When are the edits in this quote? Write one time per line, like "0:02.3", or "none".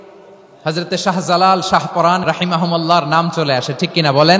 0:02.2